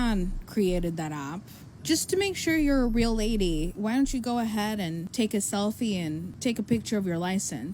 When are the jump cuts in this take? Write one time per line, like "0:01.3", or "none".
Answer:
0:01.7